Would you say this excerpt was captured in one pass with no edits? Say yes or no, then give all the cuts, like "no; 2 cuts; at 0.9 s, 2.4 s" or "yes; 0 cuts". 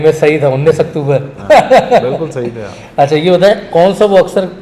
yes; 0 cuts